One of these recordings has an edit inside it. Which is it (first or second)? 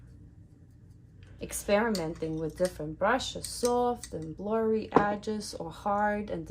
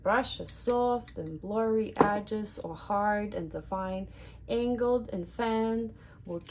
first